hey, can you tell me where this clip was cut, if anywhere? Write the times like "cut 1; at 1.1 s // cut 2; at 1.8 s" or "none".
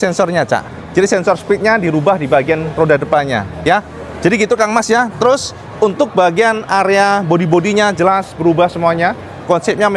none